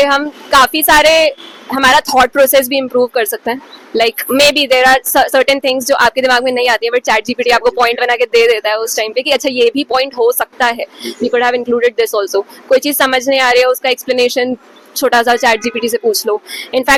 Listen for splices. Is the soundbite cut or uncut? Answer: uncut